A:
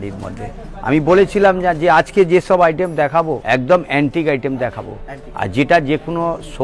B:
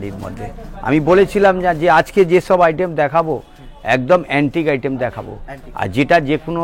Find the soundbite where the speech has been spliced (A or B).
A